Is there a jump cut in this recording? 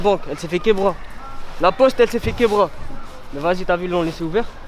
no; 0 cuts

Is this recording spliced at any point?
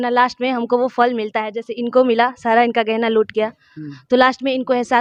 no; 0 cuts

